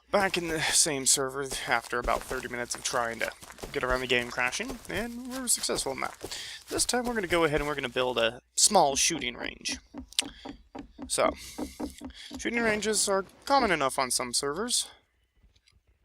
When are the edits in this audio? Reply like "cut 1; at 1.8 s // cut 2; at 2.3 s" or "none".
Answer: cut 1; at 2.9 s